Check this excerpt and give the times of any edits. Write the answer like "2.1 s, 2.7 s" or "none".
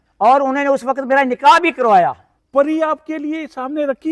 2.3 s